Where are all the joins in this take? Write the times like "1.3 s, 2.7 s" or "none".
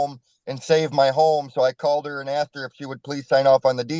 none